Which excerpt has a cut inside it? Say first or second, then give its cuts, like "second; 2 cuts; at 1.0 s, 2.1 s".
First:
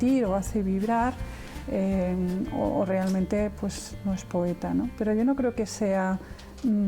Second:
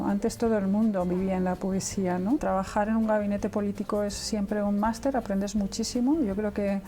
second; 1 cut; at 2.4 s